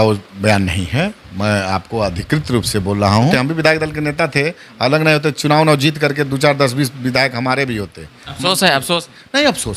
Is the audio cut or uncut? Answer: cut